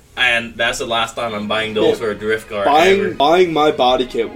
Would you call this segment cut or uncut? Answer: cut